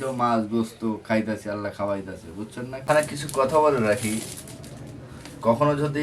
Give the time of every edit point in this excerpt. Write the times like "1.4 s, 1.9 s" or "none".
2.8 s